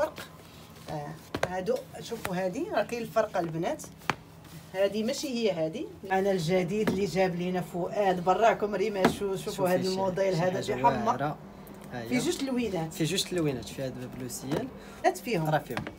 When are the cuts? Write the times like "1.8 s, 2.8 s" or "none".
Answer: 5.9 s, 15.0 s